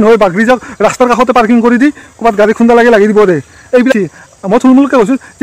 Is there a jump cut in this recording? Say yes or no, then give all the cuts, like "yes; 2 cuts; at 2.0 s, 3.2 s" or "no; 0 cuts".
yes; 1 cut; at 3.9 s